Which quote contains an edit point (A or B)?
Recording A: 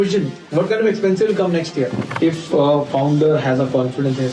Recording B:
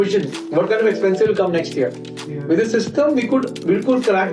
A